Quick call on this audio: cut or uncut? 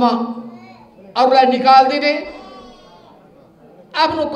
uncut